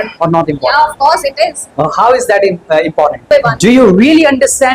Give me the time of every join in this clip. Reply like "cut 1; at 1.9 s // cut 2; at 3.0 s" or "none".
cut 1; at 3.2 s